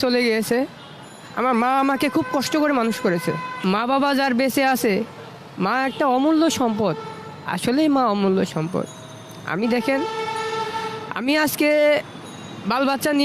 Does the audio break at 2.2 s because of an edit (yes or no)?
no